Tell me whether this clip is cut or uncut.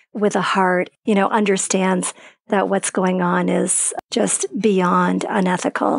cut